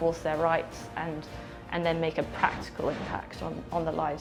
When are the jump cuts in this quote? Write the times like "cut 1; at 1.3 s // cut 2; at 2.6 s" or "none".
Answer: none